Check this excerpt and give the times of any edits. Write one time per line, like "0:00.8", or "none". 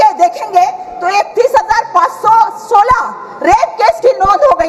none